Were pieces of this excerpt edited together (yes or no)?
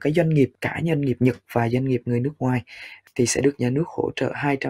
yes